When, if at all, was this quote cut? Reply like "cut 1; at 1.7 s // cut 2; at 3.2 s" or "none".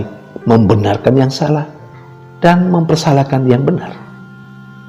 none